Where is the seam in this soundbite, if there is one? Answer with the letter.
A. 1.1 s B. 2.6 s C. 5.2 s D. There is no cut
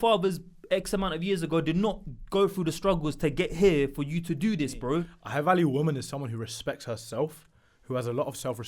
C